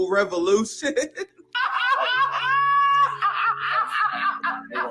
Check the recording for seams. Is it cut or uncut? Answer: uncut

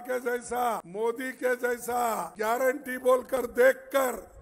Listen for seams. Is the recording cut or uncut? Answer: cut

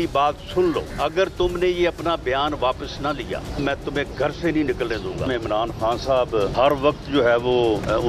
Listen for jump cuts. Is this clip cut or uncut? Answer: cut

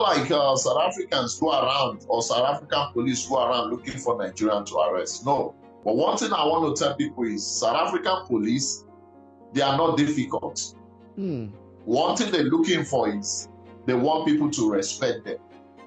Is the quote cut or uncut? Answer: cut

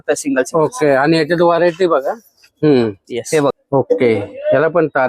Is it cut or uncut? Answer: cut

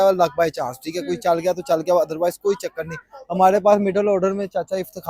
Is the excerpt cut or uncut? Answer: uncut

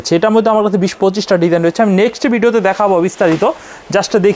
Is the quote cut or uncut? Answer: uncut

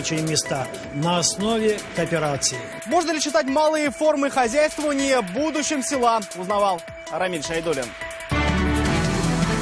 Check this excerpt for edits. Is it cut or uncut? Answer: cut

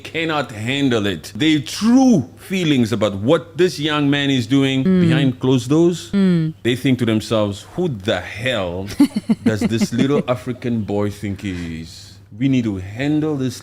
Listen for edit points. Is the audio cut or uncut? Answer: cut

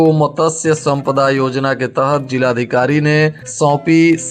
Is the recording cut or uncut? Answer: uncut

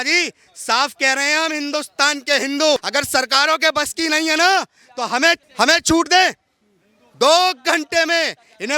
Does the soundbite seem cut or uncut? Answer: cut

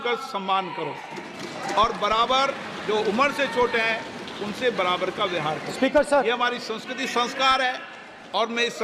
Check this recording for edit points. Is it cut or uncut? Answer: uncut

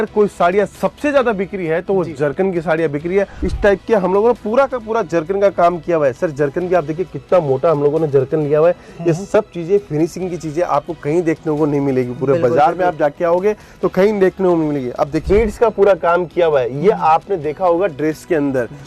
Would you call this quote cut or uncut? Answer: cut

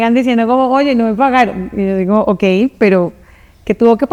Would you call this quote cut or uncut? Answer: uncut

